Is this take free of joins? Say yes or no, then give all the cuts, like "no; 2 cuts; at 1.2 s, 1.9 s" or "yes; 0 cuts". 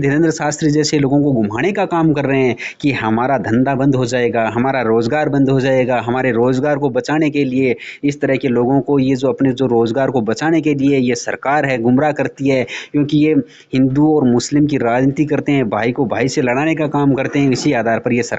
yes; 0 cuts